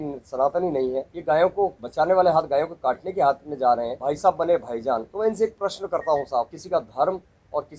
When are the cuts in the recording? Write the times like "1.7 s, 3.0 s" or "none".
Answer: 1.1 s, 1.8 s, 3.9 s, 5.1 s, 6.6 s